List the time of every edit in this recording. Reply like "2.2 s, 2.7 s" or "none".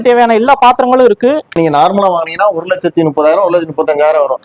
1.6 s